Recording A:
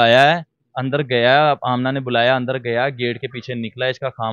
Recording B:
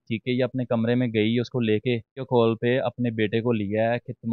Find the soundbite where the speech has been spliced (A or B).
B